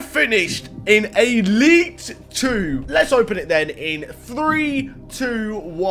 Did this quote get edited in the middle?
yes; 1 cut; at 2.8 s

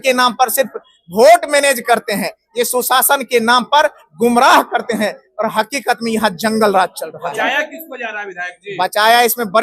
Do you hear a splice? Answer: no; 0 cuts

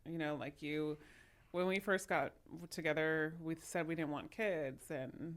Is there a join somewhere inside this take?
no; 0 cuts

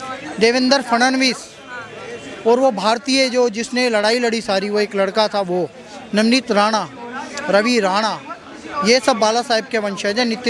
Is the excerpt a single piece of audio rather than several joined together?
yes; 0 cuts

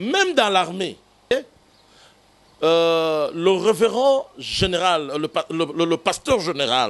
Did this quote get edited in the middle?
yes; 1 cut; at 1.3 s

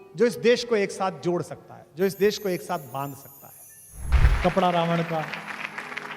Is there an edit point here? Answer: yes; 1 cut; at 4.1 s

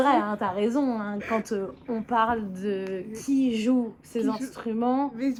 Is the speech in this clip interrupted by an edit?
no; 0 cuts

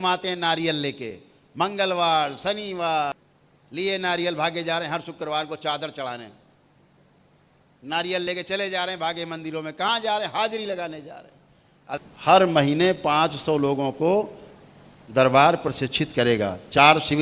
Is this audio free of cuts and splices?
no; 2 cuts; at 3.2 s, 11.8 s

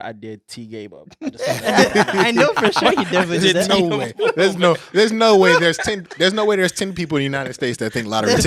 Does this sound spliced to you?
no; 0 cuts

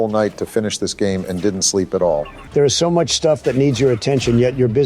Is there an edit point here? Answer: yes; 1 cut; at 2.4 s

